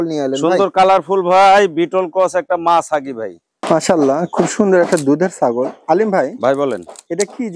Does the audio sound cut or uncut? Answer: cut